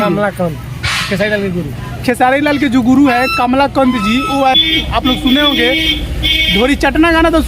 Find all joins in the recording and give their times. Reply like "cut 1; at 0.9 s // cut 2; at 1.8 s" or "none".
cut 1; at 4.6 s

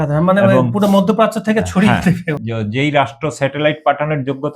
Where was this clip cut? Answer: cut 1; at 2.3 s

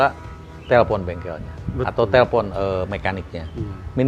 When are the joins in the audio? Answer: none

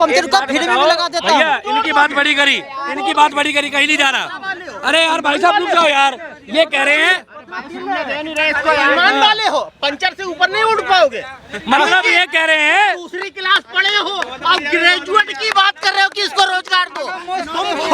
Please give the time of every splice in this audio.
none

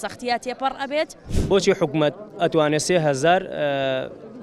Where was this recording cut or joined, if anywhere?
cut 1; at 1.3 s

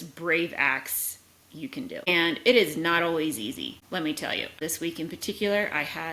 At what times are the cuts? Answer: cut 1; at 2.1 s // cut 2; at 3.8 s // cut 3; at 4.6 s

